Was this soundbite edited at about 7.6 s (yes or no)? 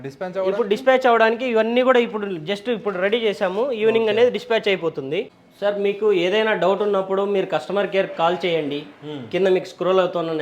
no